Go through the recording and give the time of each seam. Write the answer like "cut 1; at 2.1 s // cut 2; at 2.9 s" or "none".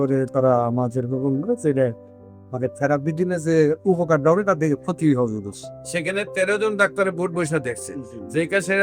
none